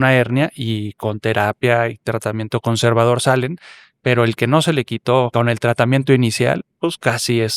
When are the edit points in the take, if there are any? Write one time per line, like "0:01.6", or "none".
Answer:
0:05.3